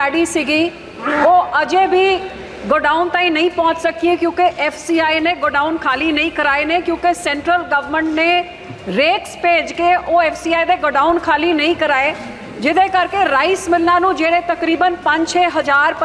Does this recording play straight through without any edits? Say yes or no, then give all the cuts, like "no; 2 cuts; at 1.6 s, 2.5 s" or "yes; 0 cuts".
yes; 0 cuts